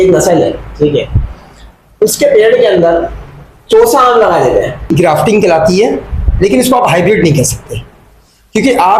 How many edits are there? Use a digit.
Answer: 1